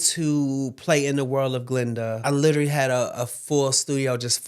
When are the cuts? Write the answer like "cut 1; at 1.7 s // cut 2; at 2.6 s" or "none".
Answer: cut 1; at 2.2 s